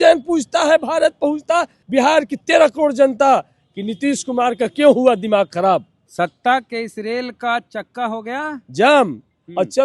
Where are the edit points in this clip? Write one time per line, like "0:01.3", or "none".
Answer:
0:01.8
0:06.0

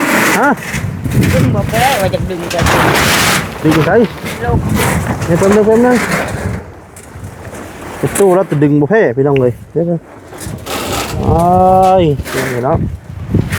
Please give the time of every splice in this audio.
none

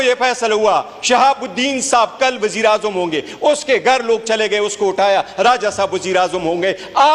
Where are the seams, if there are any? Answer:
none

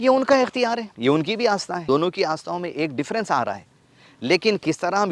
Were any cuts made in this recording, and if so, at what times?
0:00.9
0:01.8

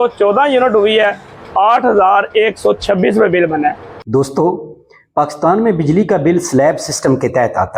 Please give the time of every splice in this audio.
0:03.9

